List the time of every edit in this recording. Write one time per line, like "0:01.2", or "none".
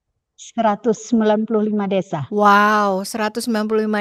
none